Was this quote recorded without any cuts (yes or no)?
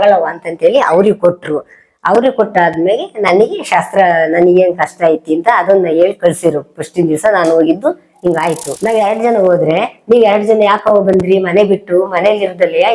no